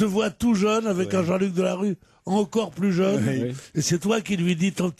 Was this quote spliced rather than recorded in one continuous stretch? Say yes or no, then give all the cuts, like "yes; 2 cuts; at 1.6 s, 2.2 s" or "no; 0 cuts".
yes; 1 cut; at 1.5 s